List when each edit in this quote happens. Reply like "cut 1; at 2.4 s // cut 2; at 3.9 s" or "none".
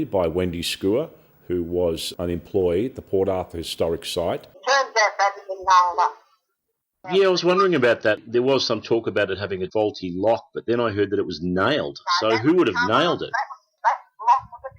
cut 1; at 4.5 s